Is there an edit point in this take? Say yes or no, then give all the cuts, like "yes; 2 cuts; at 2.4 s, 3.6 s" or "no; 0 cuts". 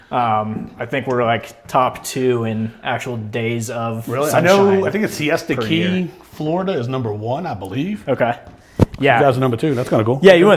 no; 0 cuts